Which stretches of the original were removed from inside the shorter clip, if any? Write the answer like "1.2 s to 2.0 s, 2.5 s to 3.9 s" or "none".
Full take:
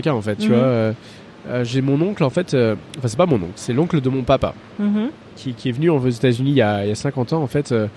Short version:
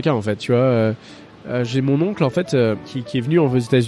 2.9 s to 5.4 s

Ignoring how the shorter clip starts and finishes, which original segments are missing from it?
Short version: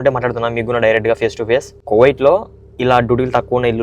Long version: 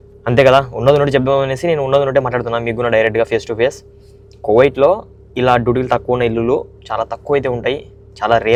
3.8 s to 4.3 s

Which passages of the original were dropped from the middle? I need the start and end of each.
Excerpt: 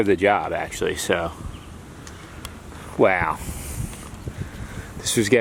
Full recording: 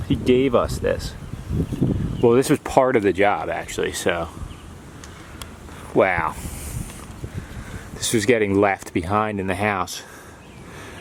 none

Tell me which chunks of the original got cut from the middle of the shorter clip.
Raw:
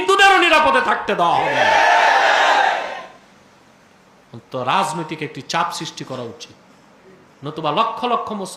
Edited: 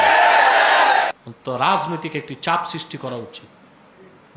2.8 s to 4.2 s

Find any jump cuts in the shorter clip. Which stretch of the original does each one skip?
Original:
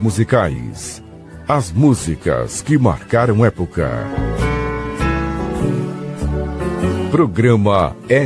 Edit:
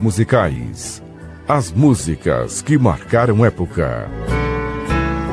4.1 s to 4.2 s

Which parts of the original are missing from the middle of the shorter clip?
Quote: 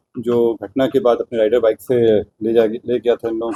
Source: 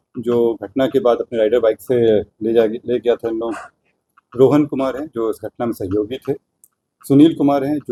none

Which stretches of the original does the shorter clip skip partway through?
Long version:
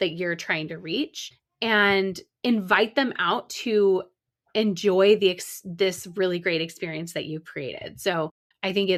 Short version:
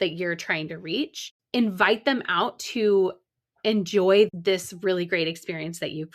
1.4 s to 2.3 s, 5.2 s to 5.6 s

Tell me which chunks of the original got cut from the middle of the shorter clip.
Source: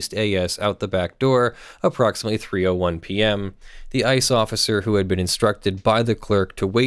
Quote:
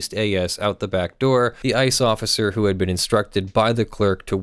1.6 s to 3.9 s

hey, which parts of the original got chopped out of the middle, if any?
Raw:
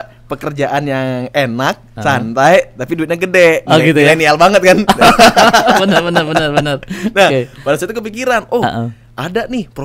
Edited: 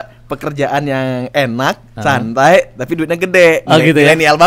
none

